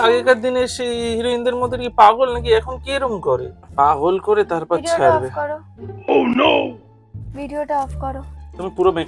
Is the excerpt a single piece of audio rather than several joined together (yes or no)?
no